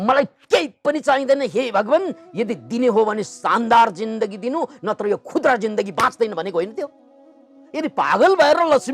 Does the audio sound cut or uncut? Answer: cut